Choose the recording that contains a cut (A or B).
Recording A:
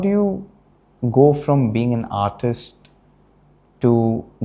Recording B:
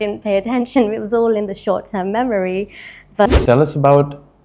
B